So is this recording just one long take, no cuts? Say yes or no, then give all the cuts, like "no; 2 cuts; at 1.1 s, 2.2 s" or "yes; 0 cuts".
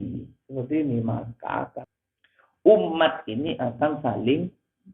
no; 1 cut; at 1.7 s